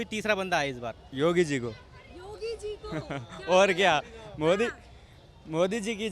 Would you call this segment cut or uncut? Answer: cut